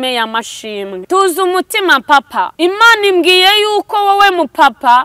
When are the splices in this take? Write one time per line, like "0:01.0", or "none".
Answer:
0:01.0
0:02.5